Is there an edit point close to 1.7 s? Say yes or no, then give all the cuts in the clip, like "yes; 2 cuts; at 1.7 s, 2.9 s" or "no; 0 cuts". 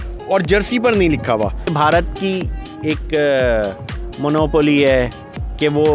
yes; 1 cut; at 1.7 s